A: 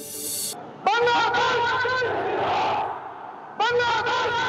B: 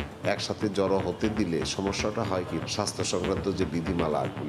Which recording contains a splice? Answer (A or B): B